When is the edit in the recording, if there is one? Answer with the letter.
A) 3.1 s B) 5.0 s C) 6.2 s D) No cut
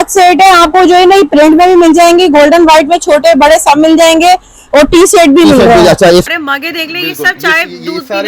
C